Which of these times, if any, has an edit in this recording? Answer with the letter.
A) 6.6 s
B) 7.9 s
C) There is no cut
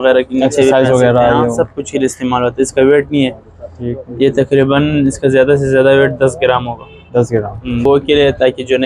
B